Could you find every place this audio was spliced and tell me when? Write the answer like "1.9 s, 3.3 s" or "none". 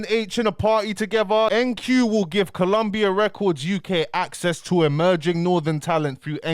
1.5 s